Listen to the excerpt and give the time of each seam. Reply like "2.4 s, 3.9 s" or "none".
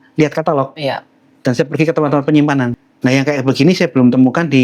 2.8 s